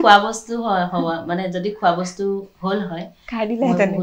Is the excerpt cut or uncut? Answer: uncut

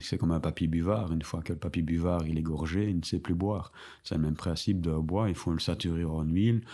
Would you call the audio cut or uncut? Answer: uncut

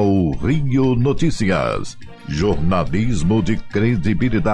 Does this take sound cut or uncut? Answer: cut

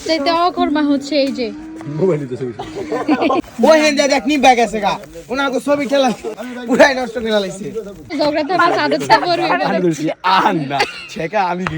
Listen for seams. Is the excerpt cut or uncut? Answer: cut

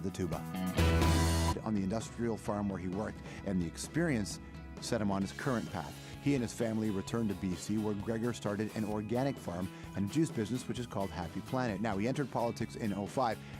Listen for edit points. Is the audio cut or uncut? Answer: uncut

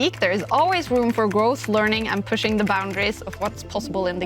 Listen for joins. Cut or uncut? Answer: uncut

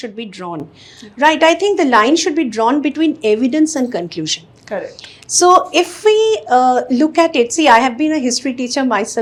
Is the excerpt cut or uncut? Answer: uncut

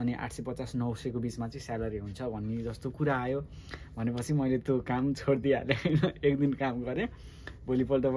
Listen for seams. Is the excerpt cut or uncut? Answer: uncut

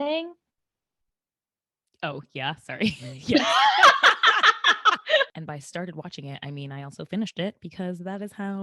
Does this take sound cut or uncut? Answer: cut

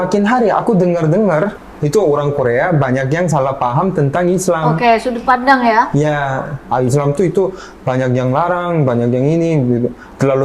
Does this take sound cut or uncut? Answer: cut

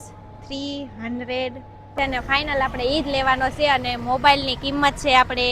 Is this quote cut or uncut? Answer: cut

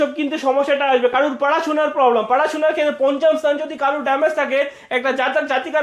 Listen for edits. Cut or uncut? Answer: uncut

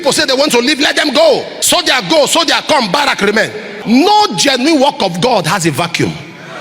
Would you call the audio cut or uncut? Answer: cut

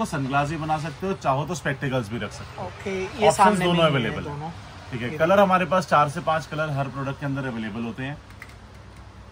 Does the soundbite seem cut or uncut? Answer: uncut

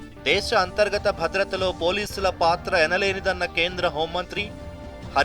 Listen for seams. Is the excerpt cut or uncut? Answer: cut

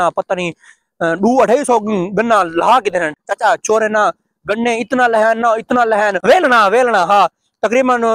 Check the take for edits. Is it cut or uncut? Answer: cut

